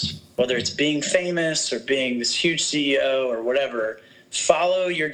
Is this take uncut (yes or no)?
yes